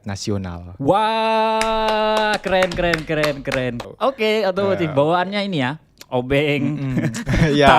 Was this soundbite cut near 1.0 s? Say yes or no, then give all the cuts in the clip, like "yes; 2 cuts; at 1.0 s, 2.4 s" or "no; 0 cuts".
no; 1 cut; at 3.8 s